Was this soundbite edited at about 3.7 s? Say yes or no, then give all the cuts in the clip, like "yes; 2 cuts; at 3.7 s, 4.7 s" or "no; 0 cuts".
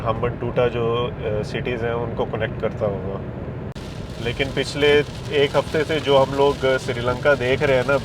yes; 1 cut; at 3.7 s